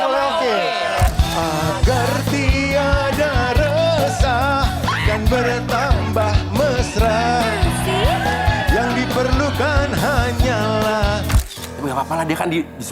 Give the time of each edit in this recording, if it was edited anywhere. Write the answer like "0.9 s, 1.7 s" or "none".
1.1 s, 11.4 s